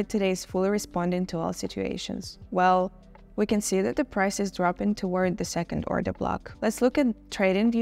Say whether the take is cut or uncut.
cut